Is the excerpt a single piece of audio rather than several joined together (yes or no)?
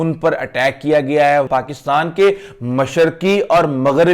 no